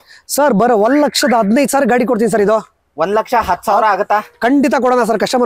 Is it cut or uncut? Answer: uncut